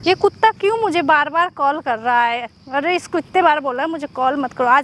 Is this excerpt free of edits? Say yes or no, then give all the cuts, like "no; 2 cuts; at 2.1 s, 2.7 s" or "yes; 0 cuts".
yes; 0 cuts